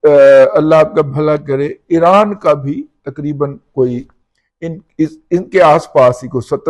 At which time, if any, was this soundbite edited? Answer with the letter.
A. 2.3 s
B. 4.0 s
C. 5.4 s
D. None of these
D